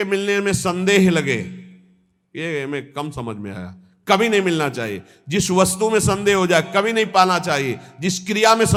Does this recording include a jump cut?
no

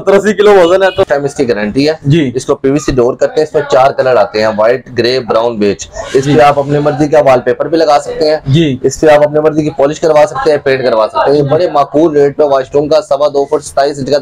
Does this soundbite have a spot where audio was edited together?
yes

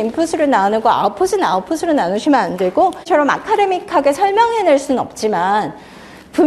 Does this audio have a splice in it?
yes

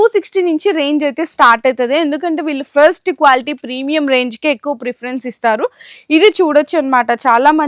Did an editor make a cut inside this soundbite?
no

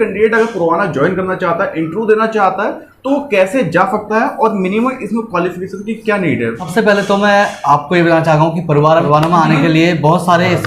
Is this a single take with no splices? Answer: no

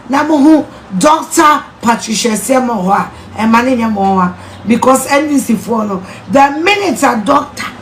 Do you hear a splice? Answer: no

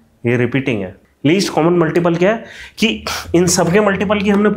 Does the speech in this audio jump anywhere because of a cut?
yes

